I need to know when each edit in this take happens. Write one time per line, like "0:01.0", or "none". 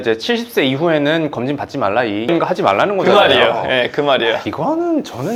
none

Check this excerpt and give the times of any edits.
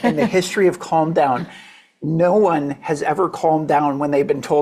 none

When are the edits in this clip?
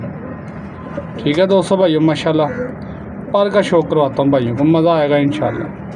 none

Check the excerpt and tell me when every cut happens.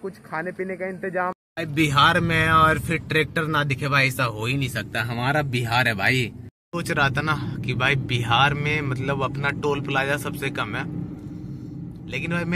0:01.5
0:06.6

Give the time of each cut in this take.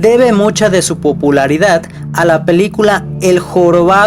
none

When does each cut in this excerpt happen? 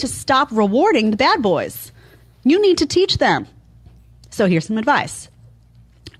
0:02.2

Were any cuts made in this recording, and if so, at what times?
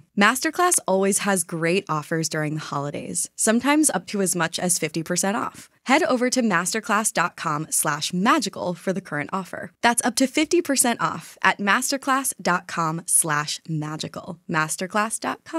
0:14.3

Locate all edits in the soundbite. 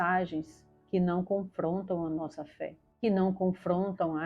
0:02.8

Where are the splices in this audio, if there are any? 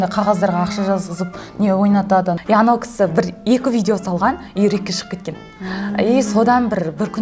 0:02.4

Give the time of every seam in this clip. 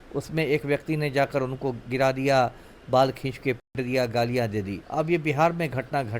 0:04.8

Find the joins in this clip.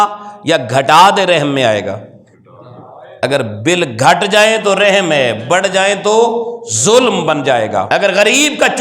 0:07.9

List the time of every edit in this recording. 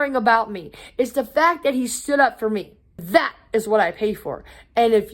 0:03.0

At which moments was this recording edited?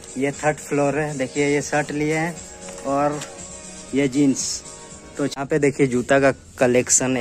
0:05.3

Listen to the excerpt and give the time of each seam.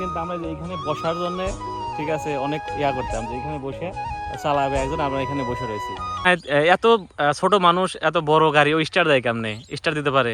0:06.3

